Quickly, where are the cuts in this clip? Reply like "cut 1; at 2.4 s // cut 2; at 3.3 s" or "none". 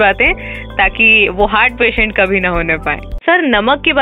cut 1; at 3.1 s